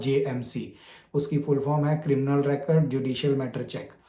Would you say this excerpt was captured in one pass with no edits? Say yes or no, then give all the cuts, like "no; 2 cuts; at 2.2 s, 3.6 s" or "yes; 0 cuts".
yes; 0 cuts